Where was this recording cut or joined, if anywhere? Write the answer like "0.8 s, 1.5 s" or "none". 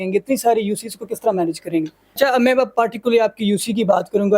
2.2 s